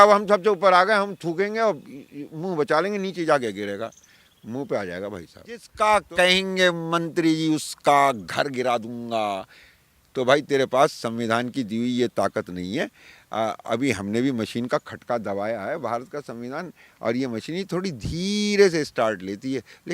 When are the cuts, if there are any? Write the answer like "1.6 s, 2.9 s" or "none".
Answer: 5.7 s